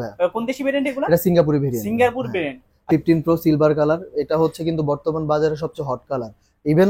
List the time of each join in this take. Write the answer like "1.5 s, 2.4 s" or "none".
2.9 s